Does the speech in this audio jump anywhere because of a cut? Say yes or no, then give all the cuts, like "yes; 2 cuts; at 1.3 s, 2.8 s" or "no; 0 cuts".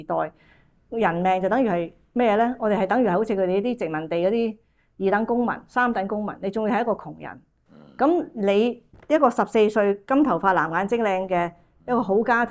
no; 0 cuts